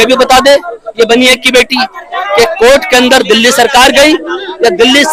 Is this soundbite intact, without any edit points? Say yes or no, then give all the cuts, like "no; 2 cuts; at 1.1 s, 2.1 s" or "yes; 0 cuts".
yes; 0 cuts